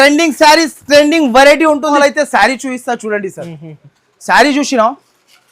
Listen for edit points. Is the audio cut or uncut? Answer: cut